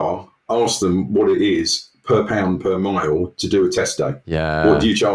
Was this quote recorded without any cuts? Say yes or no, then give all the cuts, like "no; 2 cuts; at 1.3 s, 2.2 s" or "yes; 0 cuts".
yes; 0 cuts